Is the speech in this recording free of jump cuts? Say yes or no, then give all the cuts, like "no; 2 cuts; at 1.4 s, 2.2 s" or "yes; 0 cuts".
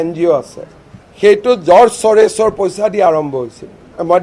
yes; 0 cuts